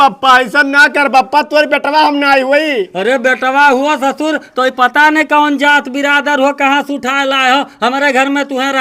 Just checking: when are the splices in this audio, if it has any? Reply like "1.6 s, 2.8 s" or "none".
none